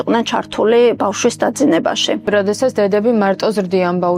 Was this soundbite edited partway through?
yes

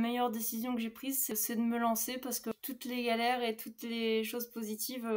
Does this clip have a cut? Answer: yes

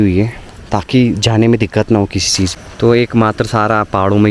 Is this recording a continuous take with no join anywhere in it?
no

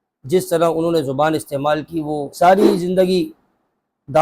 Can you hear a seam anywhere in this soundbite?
yes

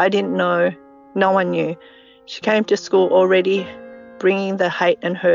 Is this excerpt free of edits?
yes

